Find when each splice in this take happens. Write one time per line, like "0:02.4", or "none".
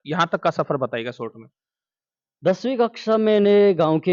none